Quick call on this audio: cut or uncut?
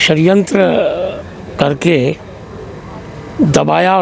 uncut